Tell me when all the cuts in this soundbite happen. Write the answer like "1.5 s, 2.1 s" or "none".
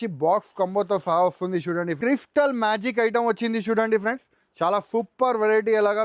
2.0 s